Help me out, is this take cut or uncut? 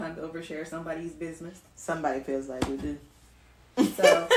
uncut